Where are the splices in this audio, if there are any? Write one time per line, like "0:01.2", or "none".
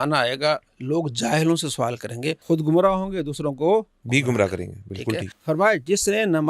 0:02.4
0:05.3